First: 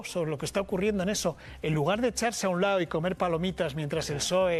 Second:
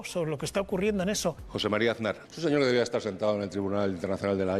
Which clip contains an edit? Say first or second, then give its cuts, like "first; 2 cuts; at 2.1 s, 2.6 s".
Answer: second; 2 cuts; at 1.5 s, 2.3 s